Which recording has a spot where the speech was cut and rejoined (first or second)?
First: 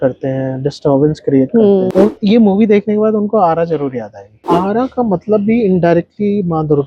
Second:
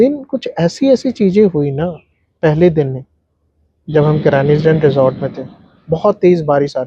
first